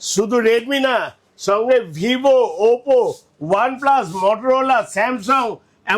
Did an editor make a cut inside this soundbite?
no; 0 cuts

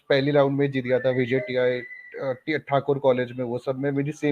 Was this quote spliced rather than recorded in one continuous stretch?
no; 0 cuts

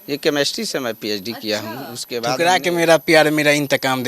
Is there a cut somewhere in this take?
yes; 1 cut; at 2.4 s

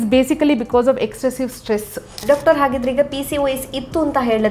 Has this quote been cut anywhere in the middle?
yes; 1 cut; at 2.2 s

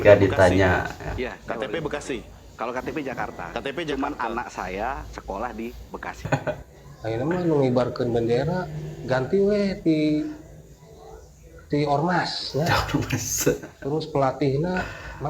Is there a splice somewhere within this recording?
yes; 1 cut; at 6.3 s

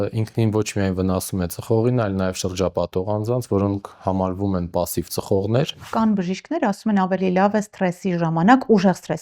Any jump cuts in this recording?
yes; 1 cut; at 5.8 s

